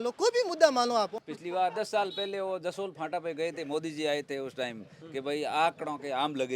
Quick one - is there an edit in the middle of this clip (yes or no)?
yes